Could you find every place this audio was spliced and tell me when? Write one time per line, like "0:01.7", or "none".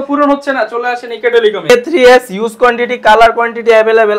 0:01.7